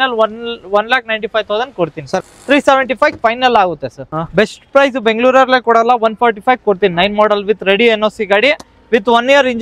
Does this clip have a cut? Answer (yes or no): yes